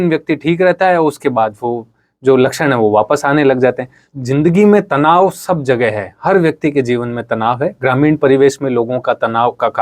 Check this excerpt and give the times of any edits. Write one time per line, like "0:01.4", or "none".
0:04.1